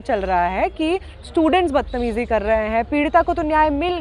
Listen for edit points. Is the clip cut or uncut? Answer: uncut